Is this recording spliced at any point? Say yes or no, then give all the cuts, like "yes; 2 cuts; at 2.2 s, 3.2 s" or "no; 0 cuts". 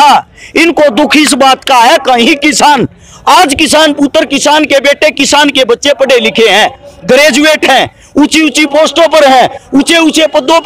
no; 0 cuts